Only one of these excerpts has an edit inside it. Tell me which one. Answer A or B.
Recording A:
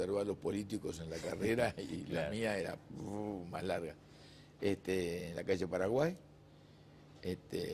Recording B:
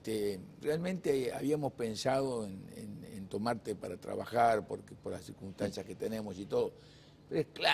A